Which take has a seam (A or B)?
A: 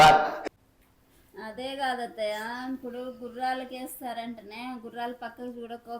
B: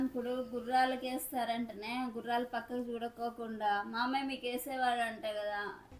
A